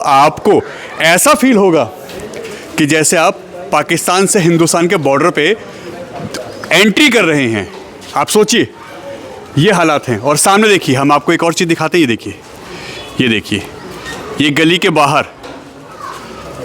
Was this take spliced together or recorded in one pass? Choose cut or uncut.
uncut